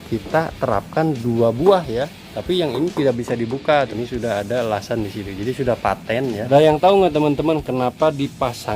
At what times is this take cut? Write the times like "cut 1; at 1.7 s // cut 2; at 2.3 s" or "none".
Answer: cut 1; at 2.2 s // cut 2; at 3.9 s // cut 3; at 6.5 s